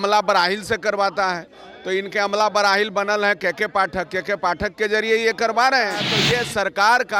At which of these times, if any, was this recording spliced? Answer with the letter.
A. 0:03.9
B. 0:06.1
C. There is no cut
B